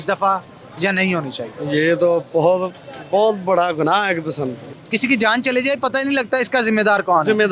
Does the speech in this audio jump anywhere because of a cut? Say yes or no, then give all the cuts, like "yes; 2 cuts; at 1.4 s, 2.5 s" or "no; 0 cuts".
yes; 1 cut; at 4.6 s